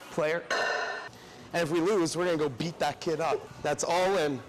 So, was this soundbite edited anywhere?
yes; 2 cuts; at 1.0 s, 3.5 s

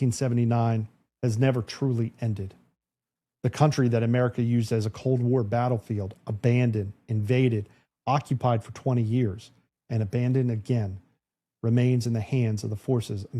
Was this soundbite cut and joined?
no; 0 cuts

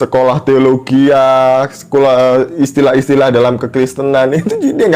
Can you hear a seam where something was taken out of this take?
no; 0 cuts

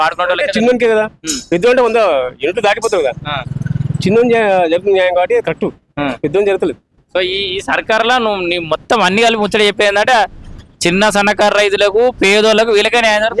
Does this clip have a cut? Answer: no; 0 cuts

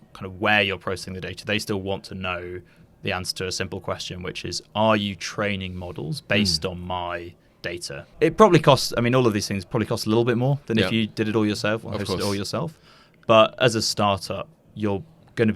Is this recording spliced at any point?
yes; 1 cut; at 8.0 s

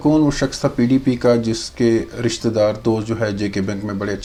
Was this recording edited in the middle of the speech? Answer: no; 0 cuts

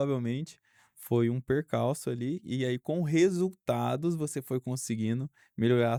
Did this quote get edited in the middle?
no; 0 cuts

